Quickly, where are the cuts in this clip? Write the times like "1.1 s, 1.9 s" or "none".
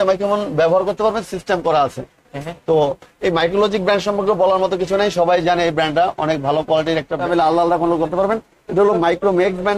7.2 s